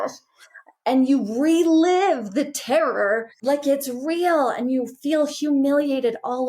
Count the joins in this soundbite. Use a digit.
1